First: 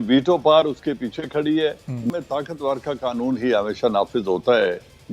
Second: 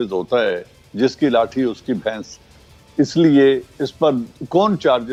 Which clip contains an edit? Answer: first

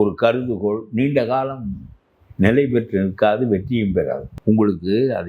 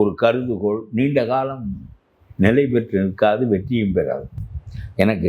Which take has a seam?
first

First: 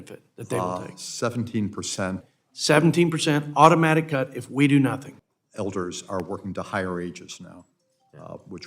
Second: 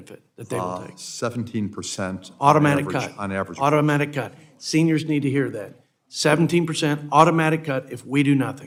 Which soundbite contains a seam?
first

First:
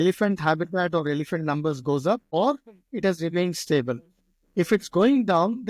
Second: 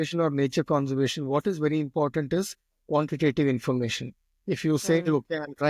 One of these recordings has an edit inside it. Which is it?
first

